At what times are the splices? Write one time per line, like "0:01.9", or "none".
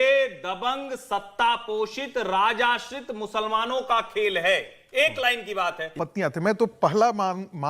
0:05.9